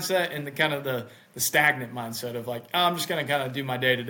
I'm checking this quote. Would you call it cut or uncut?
uncut